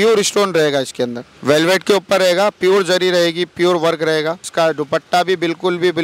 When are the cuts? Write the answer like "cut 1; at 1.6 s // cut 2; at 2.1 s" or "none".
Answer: cut 1; at 1.3 s // cut 2; at 4.5 s